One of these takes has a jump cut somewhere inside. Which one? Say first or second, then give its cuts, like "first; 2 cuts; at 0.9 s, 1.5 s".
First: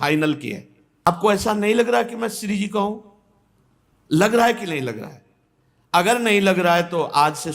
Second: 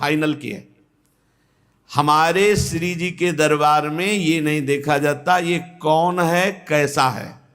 first; 1 cut; at 1.1 s